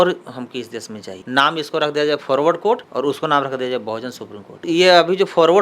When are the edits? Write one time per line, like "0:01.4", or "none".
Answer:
0:01.1
0:04.6